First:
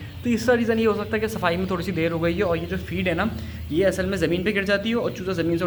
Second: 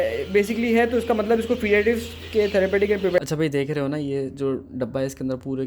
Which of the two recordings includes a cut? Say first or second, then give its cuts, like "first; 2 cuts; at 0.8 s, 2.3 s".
second; 1 cut; at 3.2 s